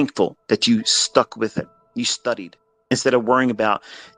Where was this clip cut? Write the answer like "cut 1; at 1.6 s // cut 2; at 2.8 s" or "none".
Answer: cut 1; at 1.8 s // cut 2; at 2.9 s